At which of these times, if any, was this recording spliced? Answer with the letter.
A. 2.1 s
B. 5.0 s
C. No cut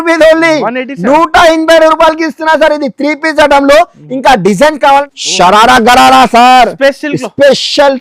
B